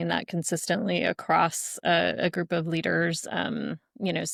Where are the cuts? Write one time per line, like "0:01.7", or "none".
none